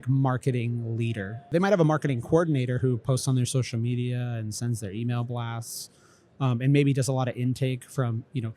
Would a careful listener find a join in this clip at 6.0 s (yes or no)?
no